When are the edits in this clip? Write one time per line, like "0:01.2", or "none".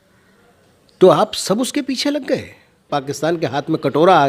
0:02.9

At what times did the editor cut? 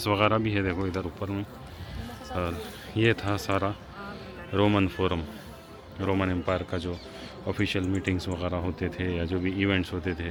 none

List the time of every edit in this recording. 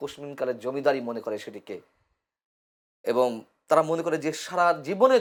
none

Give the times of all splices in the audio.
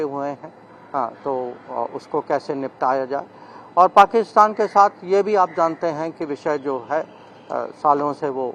none

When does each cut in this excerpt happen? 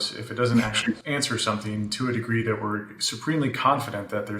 0:01.0

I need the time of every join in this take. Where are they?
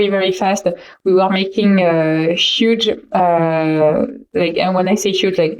none

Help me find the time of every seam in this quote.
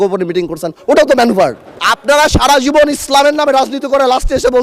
0:01.9

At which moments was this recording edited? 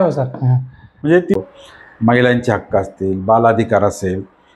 0:01.4

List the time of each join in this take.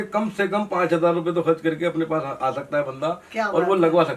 none

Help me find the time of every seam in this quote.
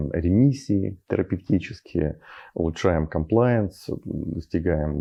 none

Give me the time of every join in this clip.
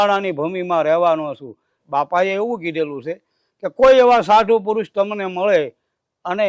0:01.8

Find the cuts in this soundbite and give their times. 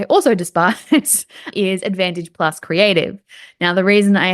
0:01.5

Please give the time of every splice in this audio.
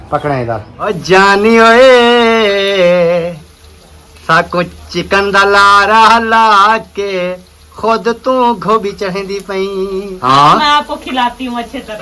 0:00.9
0:10.1

